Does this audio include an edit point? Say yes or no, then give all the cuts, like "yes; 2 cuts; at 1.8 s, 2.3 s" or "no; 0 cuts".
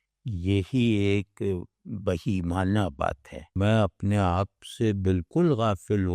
yes; 1 cut; at 3.5 s